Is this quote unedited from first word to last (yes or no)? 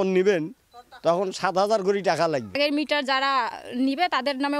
no